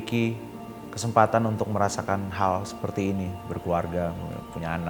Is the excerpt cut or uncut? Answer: uncut